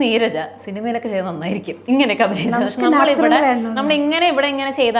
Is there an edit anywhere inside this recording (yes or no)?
no